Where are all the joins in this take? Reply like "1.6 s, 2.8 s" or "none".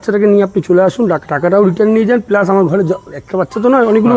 none